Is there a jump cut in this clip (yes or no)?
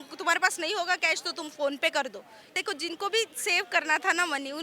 yes